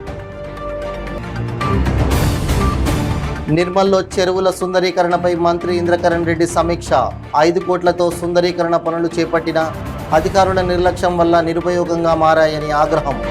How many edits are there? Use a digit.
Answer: 1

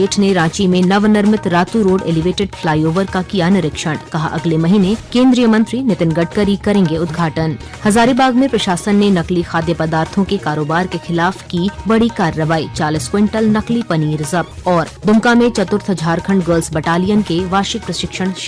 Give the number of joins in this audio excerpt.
4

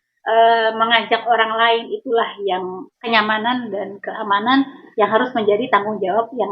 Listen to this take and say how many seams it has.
1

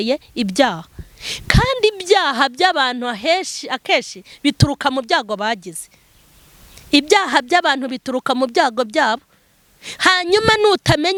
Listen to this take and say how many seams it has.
0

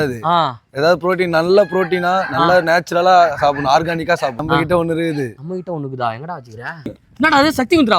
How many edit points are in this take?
2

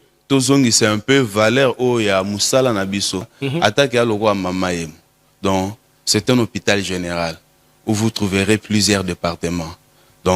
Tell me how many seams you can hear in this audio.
1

